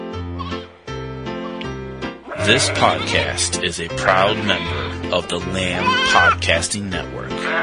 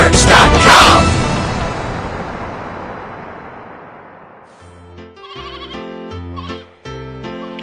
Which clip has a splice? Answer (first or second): second